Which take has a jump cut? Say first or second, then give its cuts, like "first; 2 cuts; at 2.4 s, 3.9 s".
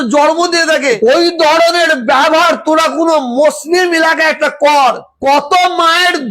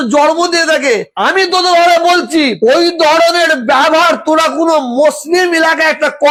first; 1 cut; at 1.0 s